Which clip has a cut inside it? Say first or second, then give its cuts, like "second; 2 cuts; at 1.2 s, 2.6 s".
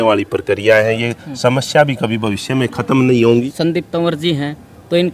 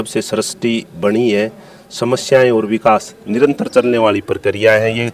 first; 1 cut; at 3.3 s